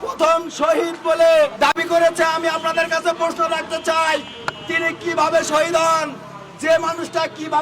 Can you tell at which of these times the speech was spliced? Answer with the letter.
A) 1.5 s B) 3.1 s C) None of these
A